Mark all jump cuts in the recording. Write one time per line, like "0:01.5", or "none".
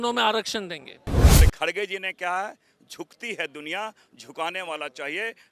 0:01.4